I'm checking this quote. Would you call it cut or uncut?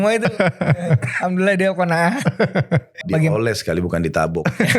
cut